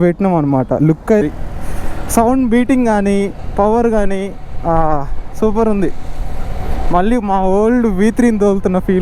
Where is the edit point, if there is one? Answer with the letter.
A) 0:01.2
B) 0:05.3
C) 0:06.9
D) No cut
A